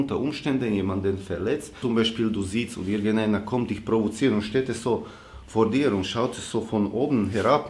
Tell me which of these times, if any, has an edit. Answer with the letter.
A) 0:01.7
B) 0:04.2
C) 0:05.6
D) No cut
A